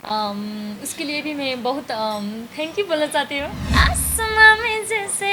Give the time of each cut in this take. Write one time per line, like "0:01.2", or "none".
0:03.6